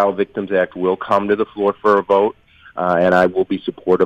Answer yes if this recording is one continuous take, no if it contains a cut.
yes